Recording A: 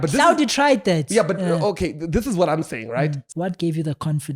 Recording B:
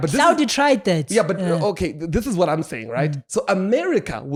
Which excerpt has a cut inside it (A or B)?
A